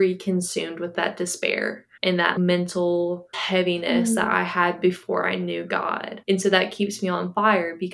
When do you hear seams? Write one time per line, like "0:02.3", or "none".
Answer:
0:00.9
0:02.3
0:03.3